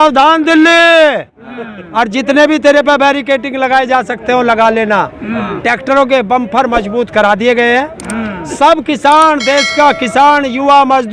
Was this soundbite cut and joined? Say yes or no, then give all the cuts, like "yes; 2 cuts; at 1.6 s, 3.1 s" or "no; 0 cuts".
no; 0 cuts